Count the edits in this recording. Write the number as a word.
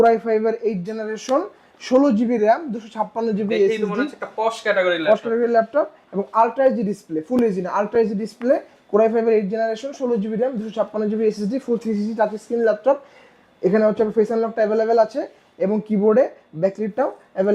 zero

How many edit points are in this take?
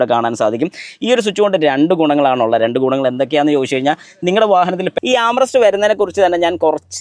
one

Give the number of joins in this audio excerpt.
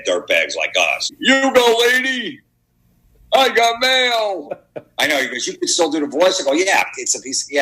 one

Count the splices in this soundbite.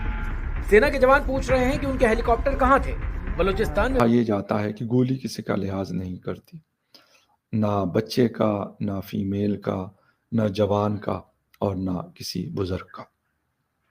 one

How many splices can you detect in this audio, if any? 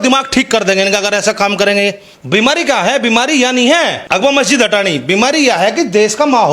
two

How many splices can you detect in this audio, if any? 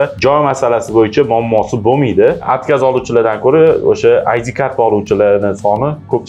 one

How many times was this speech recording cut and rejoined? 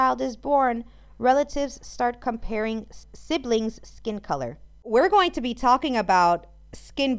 two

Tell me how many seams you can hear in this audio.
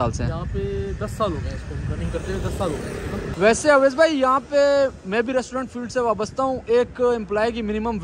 one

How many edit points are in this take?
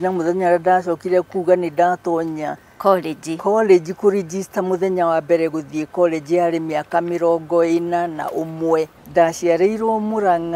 one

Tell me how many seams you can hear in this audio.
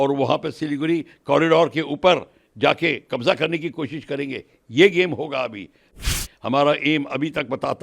one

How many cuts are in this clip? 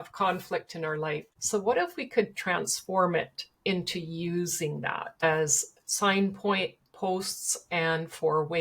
one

